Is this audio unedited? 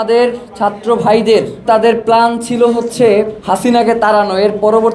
no; 2 cuts; at 1.6 s, 3.4 s

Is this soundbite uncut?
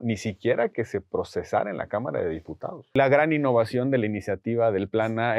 no; 1 cut; at 2.9 s

